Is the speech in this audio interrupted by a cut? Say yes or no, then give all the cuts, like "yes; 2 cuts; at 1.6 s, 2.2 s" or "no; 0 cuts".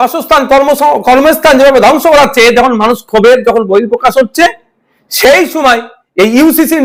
no; 0 cuts